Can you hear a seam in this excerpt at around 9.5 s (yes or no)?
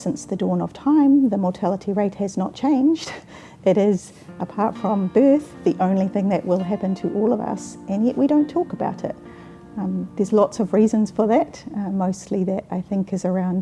no